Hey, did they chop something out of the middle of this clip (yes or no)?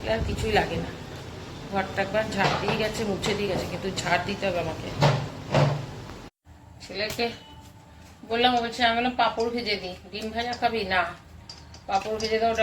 yes